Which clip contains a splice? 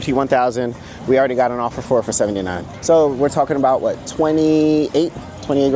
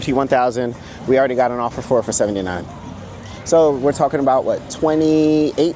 first; 1 cut; at 2.7 s

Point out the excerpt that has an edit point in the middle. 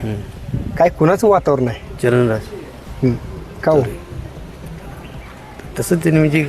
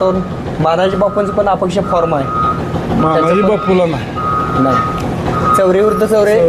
first; 1 cut; at 1.8 s

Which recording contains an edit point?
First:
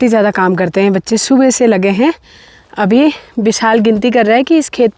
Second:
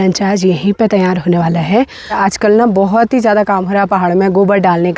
second; 1 cut; at 2.2 s

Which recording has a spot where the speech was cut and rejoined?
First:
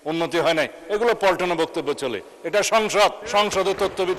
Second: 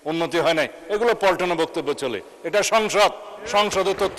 first; 1 cut; at 3.2 s

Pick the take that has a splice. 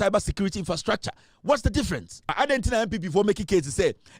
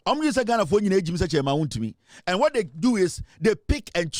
first; 1 cut; at 2.2 s

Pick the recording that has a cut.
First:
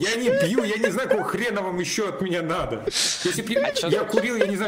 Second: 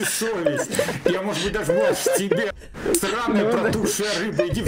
second; 1 cut; at 2.7 s

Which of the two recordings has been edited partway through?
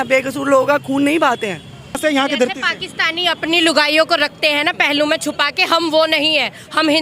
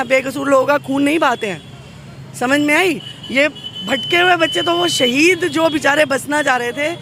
first; 1 cut; at 2.0 s

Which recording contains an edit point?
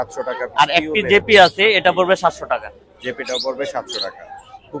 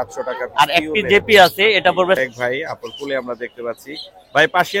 second; 1 cut; at 2.2 s

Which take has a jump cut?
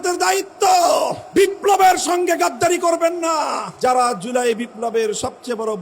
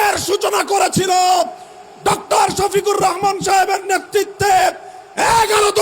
first; 2 cuts; at 1.2 s, 3.7 s

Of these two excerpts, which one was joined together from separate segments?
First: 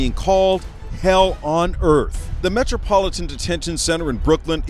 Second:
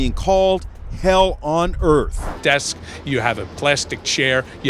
second; 1 cut; at 2.3 s

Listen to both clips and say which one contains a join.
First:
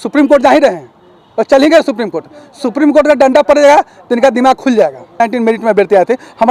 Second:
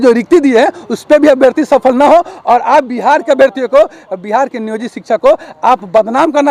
first; 1 cut; at 5.1 s

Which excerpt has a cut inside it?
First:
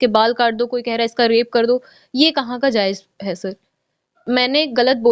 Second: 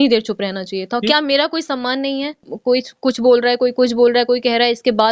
second; 1 cut; at 2.5 s

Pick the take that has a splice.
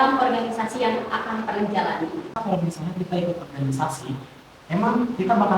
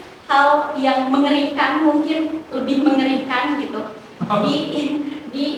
first; 1 cut; at 2.3 s

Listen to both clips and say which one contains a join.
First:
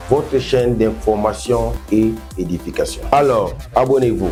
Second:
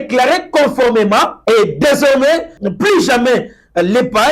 second; 2 cuts; at 1.3 s, 2.6 s

